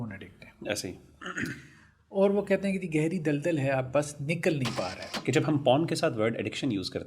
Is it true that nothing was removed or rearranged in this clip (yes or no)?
no